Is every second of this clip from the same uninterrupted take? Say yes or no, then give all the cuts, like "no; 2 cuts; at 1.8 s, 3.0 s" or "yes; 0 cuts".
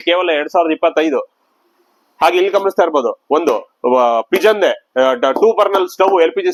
yes; 0 cuts